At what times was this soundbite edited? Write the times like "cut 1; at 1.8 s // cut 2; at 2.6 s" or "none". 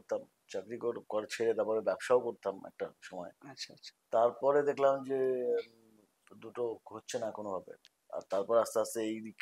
none